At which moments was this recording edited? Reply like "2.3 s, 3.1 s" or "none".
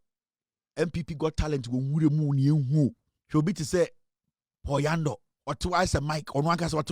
3.1 s, 5.3 s